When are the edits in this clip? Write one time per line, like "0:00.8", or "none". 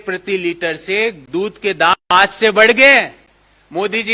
none